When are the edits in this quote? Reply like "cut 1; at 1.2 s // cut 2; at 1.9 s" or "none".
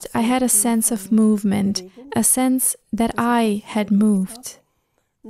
none